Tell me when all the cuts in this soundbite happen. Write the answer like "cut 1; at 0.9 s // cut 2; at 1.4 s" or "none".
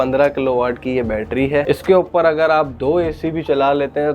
cut 1; at 1.6 s